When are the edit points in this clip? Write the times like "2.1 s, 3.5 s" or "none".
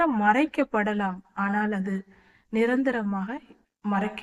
none